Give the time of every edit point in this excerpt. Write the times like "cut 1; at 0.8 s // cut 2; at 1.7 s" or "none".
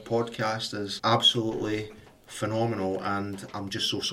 cut 1; at 0.9 s

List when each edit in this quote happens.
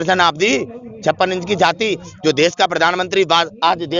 none

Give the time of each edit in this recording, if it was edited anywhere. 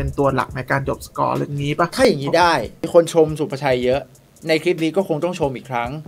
cut 1; at 2.8 s

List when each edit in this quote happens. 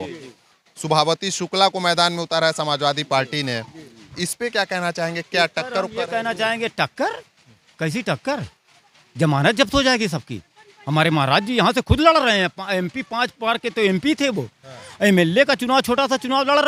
none

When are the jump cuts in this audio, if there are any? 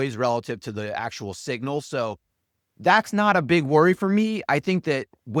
none

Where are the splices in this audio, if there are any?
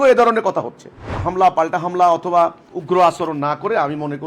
cut 1; at 1.2 s // cut 2; at 2.7 s

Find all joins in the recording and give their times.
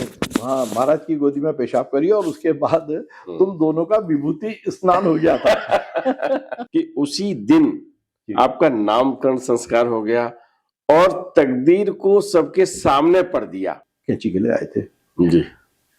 cut 1; at 6.6 s // cut 2; at 13.8 s

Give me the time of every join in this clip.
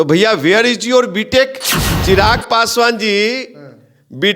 cut 1; at 1.9 s

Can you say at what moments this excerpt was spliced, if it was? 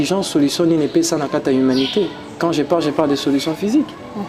none

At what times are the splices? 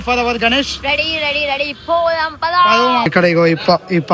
cut 1; at 3.1 s

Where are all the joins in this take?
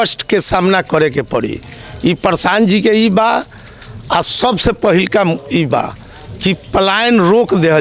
none

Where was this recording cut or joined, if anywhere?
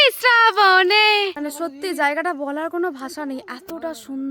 cut 1; at 1.4 s

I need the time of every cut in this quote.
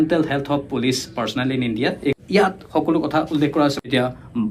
cut 1; at 2.2 s // cut 2; at 3.8 s

